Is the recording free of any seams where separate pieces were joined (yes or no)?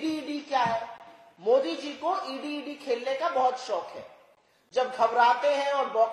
yes